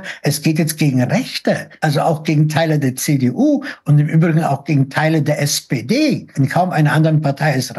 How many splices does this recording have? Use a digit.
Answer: 2